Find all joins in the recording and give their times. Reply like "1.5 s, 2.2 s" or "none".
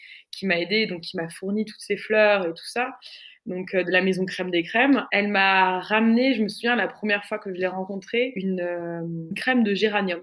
5.1 s, 8.4 s